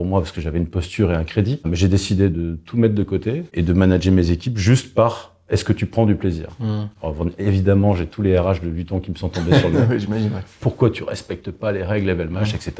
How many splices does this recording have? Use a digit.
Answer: 2